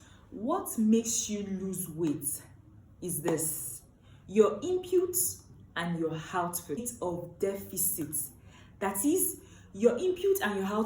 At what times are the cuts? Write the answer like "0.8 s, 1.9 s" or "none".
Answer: 6.9 s